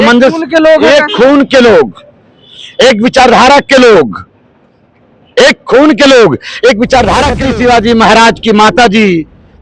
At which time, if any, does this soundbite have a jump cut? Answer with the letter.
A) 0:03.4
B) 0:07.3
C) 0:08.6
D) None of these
B